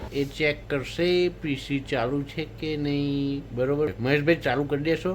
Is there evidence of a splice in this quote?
yes; 1 cut; at 4.0 s

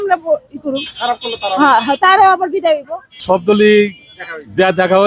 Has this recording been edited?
yes; 1 cut; at 3.2 s

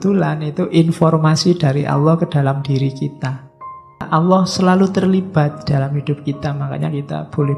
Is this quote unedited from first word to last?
no; 1 cut; at 4.1 s

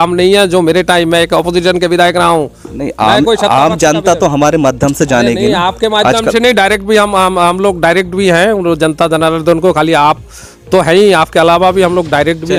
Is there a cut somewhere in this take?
no; 0 cuts

